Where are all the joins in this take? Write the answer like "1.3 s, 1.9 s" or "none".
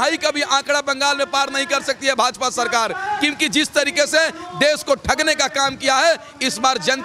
none